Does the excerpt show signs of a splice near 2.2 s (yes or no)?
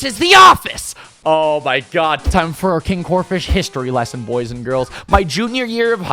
yes